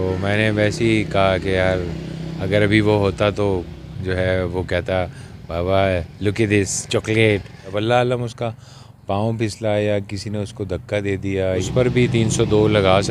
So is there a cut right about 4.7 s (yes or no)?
no